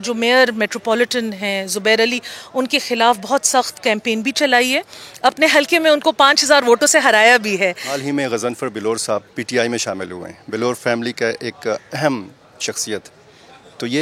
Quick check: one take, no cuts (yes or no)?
no